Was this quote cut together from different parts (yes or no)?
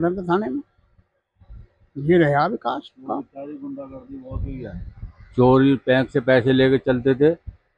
no